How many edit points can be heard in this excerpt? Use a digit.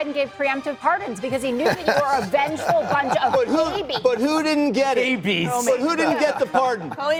0